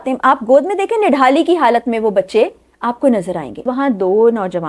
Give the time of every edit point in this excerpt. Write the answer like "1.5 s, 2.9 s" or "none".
3.6 s